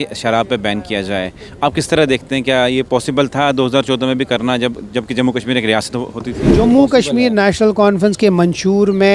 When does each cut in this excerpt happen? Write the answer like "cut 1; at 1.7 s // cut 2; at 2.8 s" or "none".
cut 1; at 6.6 s